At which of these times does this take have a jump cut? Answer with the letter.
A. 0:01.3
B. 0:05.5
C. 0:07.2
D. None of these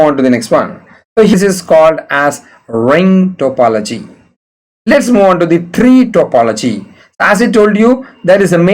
A